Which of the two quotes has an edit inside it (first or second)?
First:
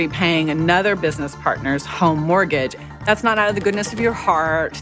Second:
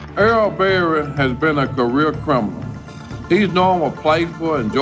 first